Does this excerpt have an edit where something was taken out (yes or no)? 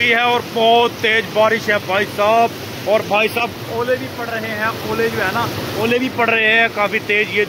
no